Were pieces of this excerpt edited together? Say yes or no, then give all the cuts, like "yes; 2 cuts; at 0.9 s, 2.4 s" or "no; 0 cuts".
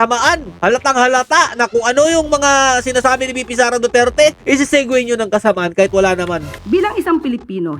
yes; 1 cut; at 6.5 s